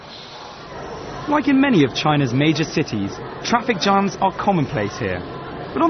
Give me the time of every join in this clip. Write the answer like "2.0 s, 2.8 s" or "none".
none